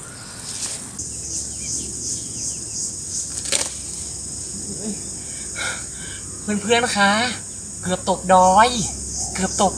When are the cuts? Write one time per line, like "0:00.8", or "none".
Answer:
0:01.0